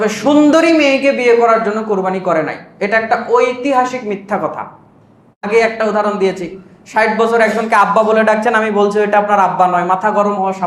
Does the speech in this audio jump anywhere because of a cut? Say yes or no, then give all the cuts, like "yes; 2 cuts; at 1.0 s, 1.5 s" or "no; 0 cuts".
yes; 1 cut; at 5.4 s